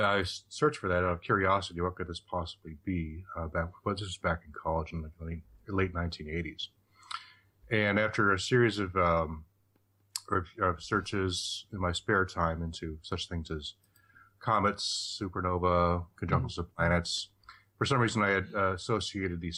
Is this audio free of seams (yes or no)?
yes